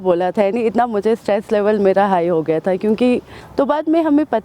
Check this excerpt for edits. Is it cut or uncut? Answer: cut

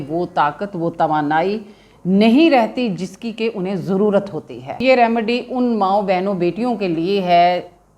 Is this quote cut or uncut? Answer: cut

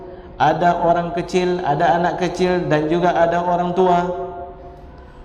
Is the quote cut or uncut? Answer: uncut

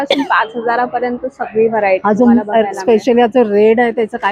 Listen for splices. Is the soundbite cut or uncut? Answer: uncut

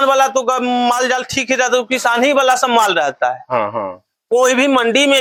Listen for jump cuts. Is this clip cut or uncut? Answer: uncut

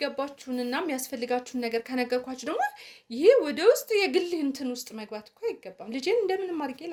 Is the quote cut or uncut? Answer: uncut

